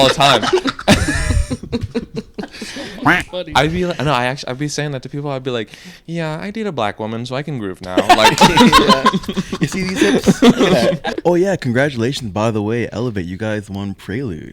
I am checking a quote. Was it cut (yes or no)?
yes